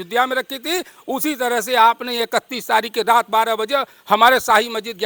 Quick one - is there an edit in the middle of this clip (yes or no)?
no